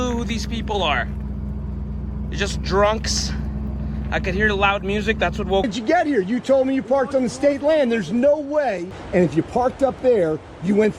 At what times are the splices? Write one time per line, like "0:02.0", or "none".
0:05.7
0:08.9